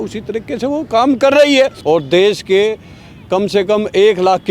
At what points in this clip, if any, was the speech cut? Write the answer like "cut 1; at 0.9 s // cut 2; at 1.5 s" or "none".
cut 1; at 1.8 s